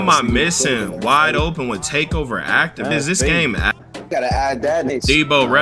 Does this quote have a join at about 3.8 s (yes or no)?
yes